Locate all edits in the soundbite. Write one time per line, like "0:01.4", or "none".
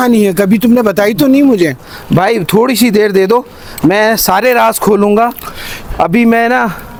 none